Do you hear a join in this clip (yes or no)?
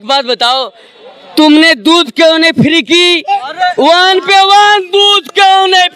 no